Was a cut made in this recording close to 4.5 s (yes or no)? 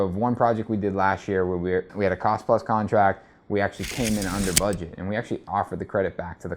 no